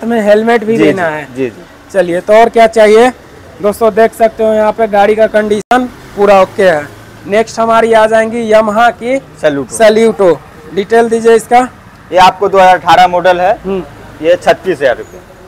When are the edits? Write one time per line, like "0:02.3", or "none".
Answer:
none